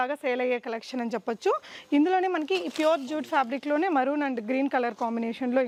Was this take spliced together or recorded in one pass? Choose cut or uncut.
uncut